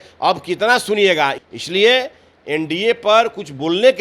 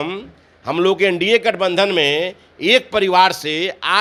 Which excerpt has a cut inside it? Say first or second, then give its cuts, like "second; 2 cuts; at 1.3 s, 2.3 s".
first; 1 cut; at 1.4 s